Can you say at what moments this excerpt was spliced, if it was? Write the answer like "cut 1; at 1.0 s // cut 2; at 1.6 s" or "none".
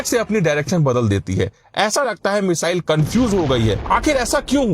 cut 1; at 3.8 s